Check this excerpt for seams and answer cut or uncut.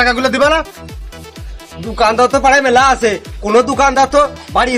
uncut